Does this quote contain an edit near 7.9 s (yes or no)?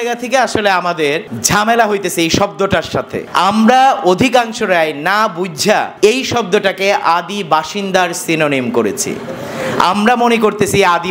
no